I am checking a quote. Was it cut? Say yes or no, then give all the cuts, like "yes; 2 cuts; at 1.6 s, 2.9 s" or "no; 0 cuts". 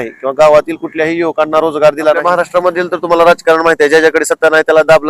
yes; 1 cut; at 2.2 s